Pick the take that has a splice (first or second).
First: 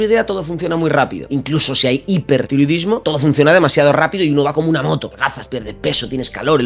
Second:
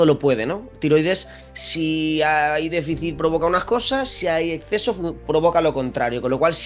first